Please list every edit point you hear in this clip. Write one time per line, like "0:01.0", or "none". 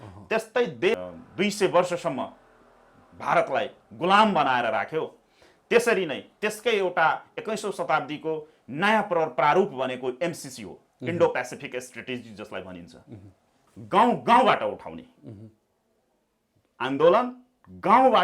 0:00.9
0:13.6